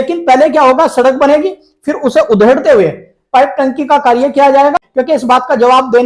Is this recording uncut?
no; 1 cut; at 4.8 s

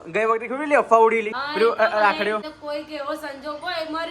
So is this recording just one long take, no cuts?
no; 2 cuts; at 1.4 s, 2.5 s

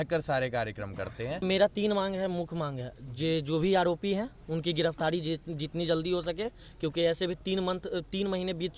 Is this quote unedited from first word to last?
no; 1 cut; at 1.4 s

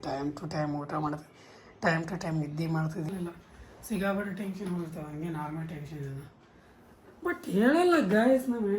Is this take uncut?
no; 1 cut; at 3.1 s

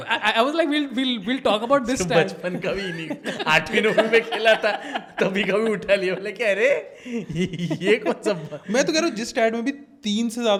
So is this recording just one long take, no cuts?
yes; 0 cuts

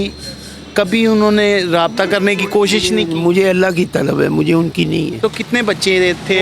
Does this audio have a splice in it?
yes; 1 cut; at 5.2 s

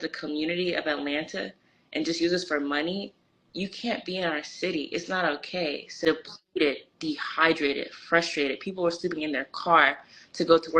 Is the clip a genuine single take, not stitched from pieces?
no; 1 cut; at 5.9 s

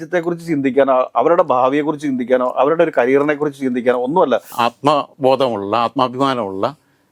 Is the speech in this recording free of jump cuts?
no; 1 cut; at 4.5 s

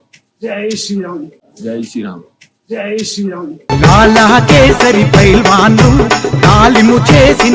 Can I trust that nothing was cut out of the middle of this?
yes; 0 cuts

